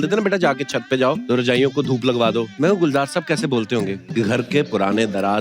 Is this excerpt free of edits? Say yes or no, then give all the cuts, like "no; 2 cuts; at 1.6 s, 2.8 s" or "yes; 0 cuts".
no; 3 cuts; at 1.2 s, 2.5 s, 4.0 s